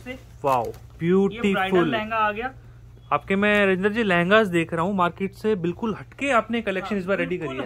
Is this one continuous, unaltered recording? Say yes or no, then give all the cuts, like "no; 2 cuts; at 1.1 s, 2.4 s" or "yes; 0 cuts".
yes; 0 cuts